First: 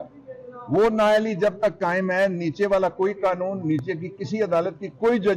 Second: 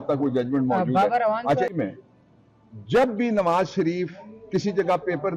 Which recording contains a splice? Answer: second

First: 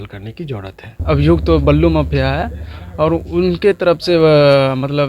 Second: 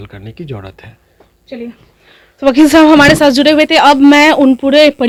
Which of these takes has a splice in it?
first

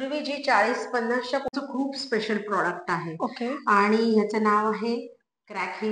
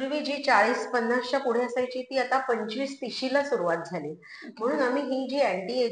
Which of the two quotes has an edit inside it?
first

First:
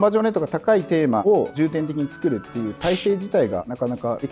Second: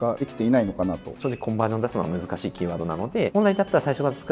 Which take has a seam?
second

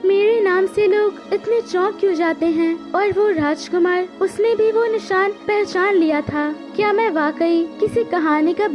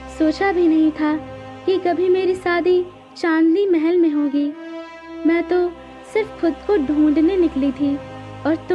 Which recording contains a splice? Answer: first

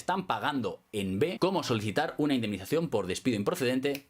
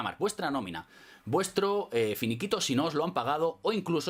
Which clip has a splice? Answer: first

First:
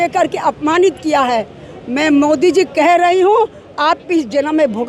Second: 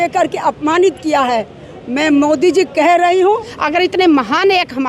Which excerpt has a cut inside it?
second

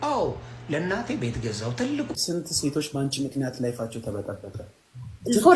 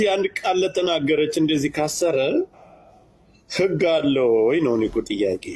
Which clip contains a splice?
first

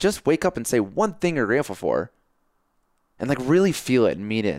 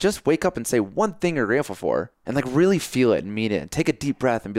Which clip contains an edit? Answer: second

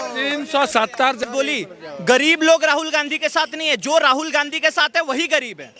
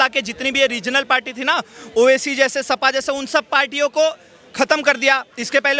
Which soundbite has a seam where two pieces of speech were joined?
first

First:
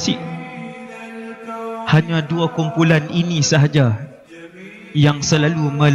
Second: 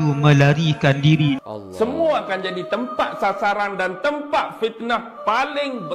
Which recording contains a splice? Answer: second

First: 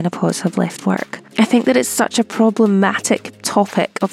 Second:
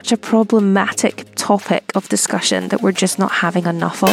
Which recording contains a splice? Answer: first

